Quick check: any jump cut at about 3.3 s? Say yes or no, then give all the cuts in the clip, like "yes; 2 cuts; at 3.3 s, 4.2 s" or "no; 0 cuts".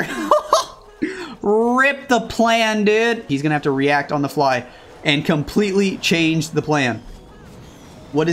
yes; 1 cut; at 3.3 s